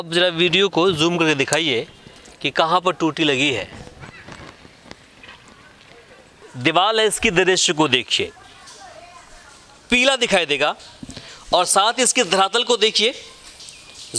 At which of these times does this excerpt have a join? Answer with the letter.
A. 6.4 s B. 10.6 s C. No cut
A